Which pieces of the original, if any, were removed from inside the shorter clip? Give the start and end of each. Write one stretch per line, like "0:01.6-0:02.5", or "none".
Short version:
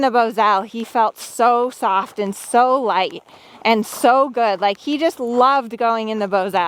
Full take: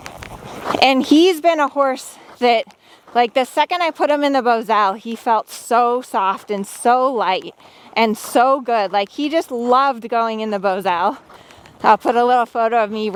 none